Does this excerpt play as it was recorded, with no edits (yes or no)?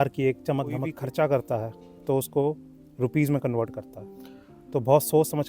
no